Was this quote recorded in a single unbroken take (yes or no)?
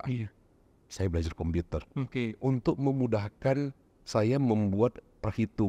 yes